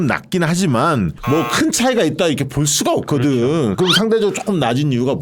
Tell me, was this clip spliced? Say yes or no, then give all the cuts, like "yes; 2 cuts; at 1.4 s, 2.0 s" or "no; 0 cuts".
yes; 2 cuts; at 1.2 s, 3.7 s